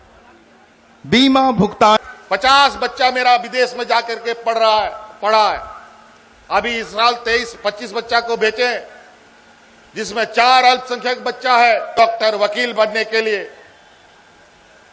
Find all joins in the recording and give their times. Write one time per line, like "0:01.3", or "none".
0:01.8
0:12.0